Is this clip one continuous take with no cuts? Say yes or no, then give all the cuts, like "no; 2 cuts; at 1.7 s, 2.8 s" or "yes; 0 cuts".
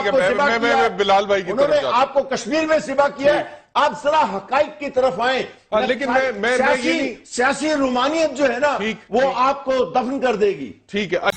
yes; 0 cuts